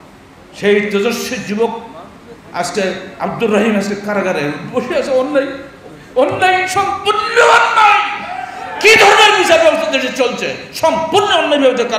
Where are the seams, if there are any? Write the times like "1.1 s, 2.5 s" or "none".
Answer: none